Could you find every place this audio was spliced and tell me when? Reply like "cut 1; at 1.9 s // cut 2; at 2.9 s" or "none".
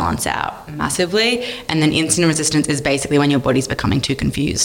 none